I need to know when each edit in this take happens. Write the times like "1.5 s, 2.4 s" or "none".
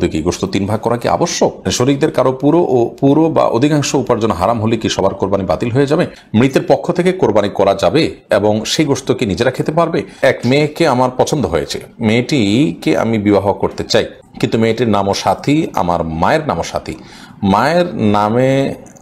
1.7 s, 6.2 s, 10.2 s, 14.2 s